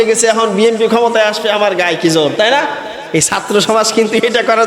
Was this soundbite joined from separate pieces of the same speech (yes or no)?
yes